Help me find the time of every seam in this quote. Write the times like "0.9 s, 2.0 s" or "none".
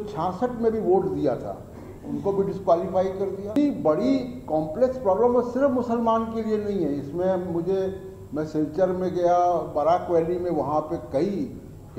3.6 s